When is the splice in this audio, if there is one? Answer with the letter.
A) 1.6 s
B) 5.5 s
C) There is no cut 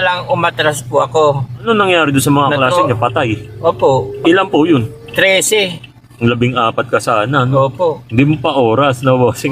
A